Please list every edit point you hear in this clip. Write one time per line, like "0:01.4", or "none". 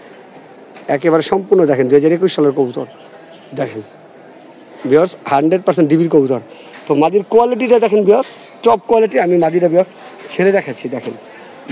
none

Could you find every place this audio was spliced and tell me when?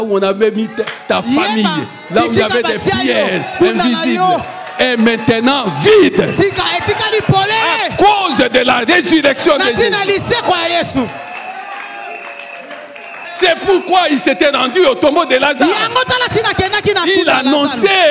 0:13.2

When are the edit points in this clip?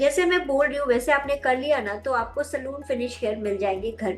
none

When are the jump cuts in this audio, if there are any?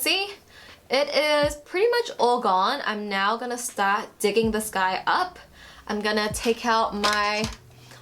none

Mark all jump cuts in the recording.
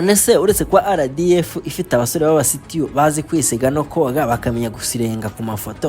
none

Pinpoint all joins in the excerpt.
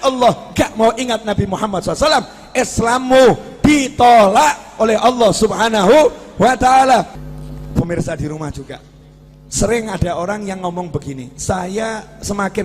0:07.2

